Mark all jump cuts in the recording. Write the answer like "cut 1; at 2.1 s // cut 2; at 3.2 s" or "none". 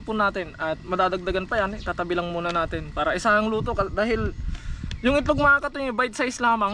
none